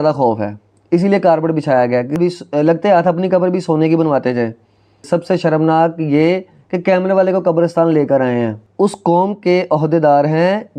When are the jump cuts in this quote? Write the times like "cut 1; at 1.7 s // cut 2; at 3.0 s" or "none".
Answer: cut 1; at 2.2 s // cut 2; at 5.0 s // cut 3; at 8.6 s